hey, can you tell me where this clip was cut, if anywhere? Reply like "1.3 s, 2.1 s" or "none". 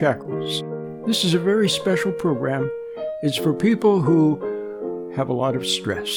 none